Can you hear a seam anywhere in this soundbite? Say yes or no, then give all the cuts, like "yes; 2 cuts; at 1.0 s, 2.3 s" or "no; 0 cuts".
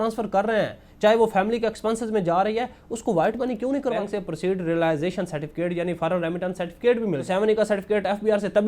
yes; 2 cuts; at 4.0 s, 7.2 s